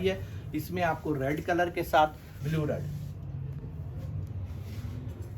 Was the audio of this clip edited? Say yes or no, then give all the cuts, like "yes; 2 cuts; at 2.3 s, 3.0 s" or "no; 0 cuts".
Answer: yes; 1 cut; at 2.3 s